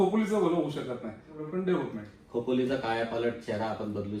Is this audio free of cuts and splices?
no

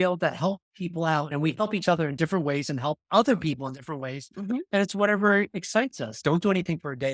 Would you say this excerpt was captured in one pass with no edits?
no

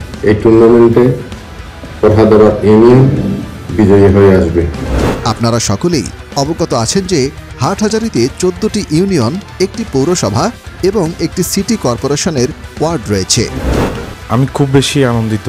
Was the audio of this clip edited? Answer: no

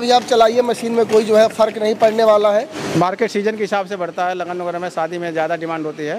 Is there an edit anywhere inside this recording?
yes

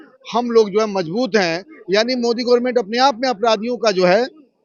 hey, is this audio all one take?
yes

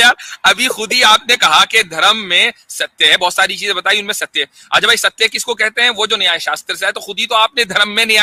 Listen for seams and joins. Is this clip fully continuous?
yes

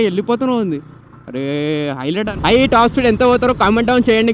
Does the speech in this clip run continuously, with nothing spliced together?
no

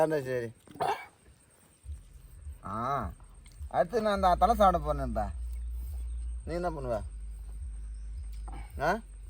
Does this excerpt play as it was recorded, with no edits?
yes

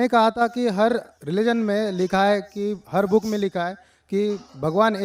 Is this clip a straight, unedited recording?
yes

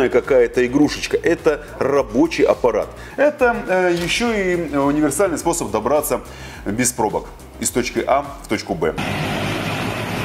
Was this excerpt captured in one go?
no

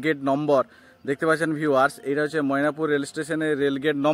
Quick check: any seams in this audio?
no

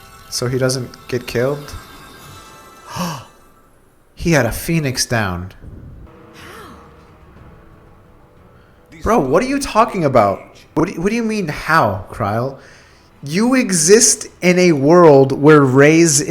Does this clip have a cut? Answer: yes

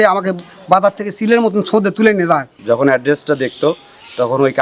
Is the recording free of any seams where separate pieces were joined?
no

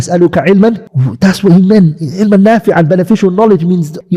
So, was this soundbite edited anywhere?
no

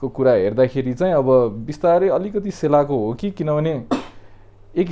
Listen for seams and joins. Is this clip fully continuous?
yes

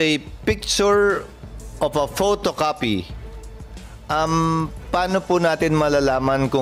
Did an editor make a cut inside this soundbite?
no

